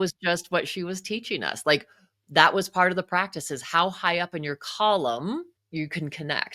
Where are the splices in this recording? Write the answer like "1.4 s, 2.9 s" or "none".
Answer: 5.6 s